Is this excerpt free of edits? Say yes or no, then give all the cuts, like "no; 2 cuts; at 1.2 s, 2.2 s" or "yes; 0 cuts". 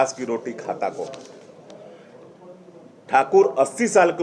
yes; 0 cuts